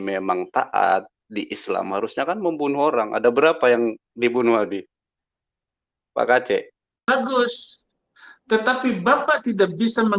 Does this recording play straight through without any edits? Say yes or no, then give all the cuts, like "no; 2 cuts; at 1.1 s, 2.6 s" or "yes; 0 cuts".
no; 1 cut; at 6.9 s